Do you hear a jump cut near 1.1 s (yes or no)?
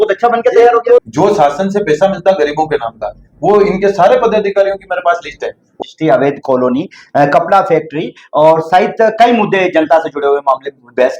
yes